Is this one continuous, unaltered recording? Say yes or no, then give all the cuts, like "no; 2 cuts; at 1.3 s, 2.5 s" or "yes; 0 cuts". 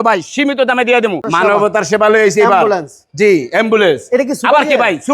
no; 1 cut; at 1.3 s